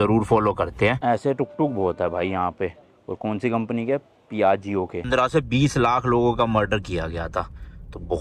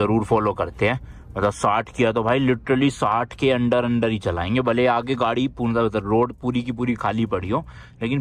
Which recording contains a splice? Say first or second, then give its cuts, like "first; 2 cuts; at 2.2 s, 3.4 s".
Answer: first; 2 cuts; at 1.0 s, 5.1 s